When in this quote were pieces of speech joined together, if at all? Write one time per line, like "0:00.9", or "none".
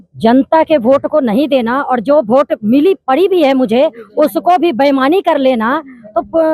none